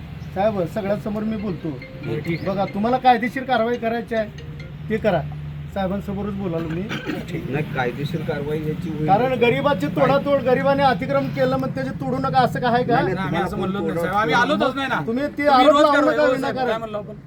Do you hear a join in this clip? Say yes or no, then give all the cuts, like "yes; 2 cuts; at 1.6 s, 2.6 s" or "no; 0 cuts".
no; 0 cuts